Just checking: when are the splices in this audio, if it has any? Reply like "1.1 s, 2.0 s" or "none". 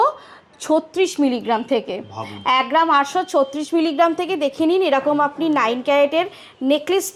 none